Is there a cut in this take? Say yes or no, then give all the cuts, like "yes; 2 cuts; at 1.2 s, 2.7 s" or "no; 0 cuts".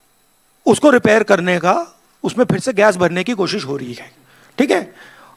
no; 0 cuts